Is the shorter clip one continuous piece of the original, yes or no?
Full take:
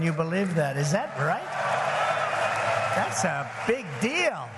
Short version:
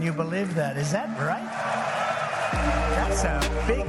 yes